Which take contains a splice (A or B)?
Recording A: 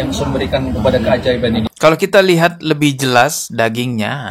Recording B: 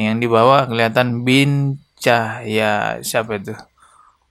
A